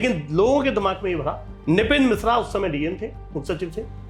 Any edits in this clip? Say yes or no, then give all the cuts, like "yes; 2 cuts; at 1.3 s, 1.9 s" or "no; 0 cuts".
yes; 1 cut; at 1.5 s